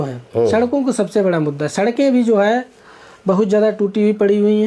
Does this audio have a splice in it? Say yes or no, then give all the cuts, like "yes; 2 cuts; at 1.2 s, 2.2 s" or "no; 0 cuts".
no; 0 cuts